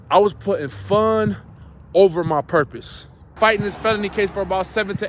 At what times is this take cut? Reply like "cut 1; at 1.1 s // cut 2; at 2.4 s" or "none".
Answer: cut 1; at 3.3 s